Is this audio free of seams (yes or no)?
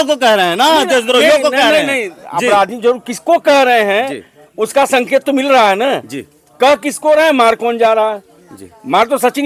yes